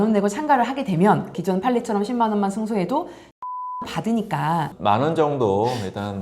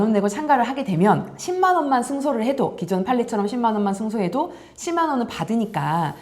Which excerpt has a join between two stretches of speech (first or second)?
first